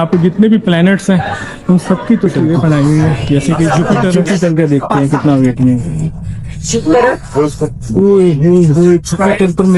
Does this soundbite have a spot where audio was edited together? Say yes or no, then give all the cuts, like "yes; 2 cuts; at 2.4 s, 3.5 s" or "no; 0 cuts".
yes; 1 cut; at 4.2 s